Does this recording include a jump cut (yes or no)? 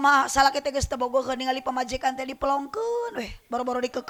no